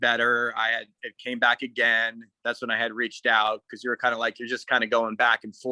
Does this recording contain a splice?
no; 0 cuts

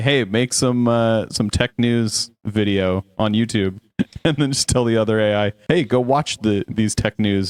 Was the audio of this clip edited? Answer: no; 0 cuts

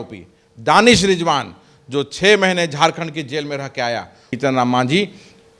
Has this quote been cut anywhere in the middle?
yes; 1 cut; at 4.3 s

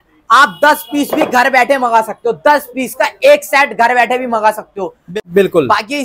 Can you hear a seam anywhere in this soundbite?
yes; 1 cut; at 5.1 s

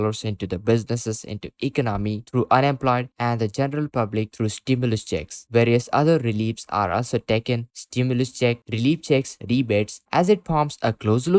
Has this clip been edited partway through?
no; 0 cuts

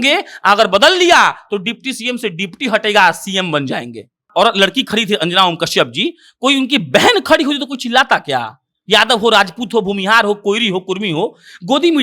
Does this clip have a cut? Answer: yes; 1 cut; at 4.3 s

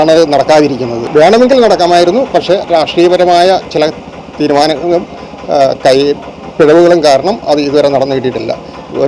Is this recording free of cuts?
no; 1 cut; at 0.9 s

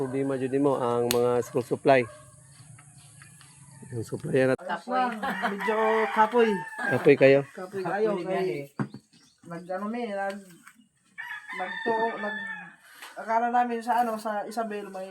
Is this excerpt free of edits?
no; 1 cut; at 4.6 s

